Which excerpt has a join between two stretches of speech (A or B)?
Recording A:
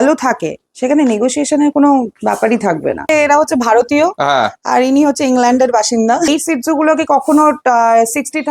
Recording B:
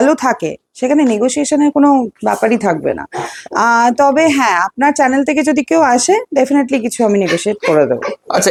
A